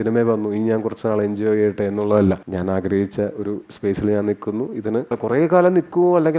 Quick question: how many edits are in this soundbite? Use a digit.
2